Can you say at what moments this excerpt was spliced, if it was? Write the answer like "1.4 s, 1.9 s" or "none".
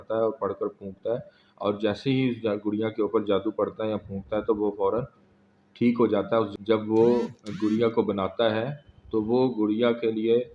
6.5 s

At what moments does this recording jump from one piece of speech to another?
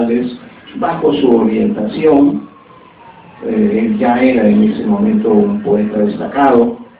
none

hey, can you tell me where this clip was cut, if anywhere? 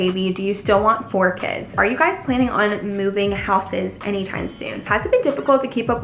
1.7 s, 4.9 s

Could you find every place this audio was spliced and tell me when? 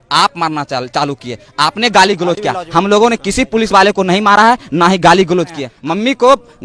5.7 s

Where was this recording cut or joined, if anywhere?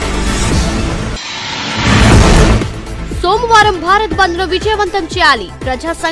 1.0 s

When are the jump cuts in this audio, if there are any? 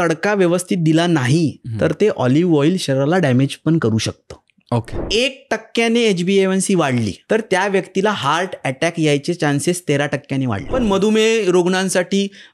5.0 s, 7.2 s, 10.6 s

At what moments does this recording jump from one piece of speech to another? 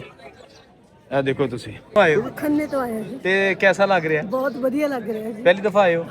2.0 s

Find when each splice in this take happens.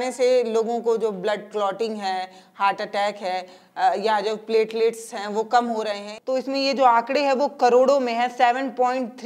6.1 s

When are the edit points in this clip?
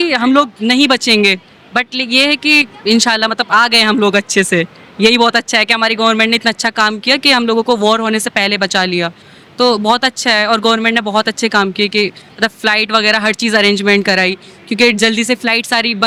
none

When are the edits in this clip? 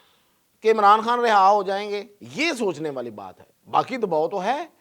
2.2 s

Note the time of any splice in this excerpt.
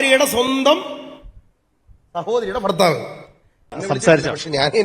3.7 s

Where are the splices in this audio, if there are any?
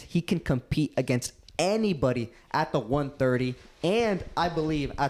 none

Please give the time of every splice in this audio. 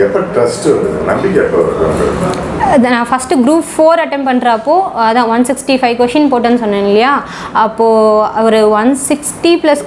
none

